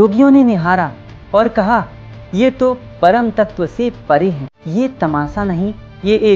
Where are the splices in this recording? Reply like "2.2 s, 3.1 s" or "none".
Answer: 4.5 s